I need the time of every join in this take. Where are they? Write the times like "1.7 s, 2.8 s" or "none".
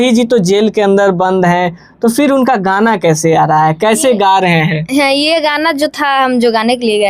none